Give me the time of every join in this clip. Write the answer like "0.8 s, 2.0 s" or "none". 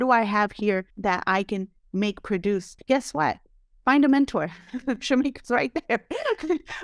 0.9 s, 2.7 s